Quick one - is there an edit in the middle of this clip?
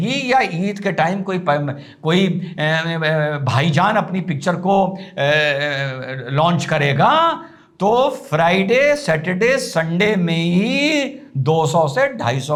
no; 0 cuts

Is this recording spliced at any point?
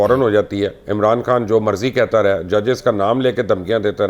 no; 0 cuts

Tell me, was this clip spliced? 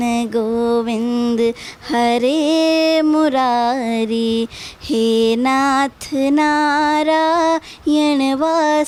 no; 0 cuts

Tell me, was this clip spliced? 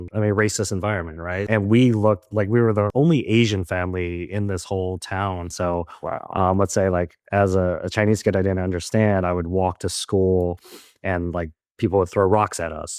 yes; 2 cuts; at 1.5 s, 5.5 s

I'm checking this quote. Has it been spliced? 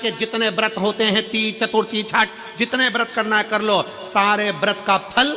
no; 0 cuts

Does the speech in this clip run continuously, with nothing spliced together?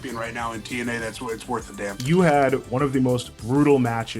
no; 2 cuts; at 2.0 s, 3.2 s

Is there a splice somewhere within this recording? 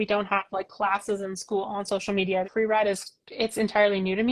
yes; 1 cut; at 2.5 s

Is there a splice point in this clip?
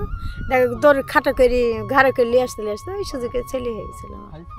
no; 0 cuts

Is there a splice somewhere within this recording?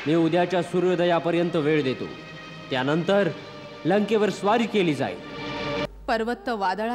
yes; 1 cut; at 5.9 s

